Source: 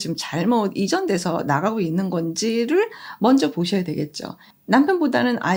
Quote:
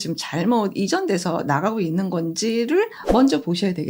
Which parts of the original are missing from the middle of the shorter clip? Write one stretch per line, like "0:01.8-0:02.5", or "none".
0:03.0-0:03.1